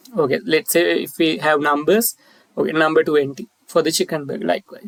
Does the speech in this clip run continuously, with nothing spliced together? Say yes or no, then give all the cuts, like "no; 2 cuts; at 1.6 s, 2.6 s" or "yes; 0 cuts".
yes; 0 cuts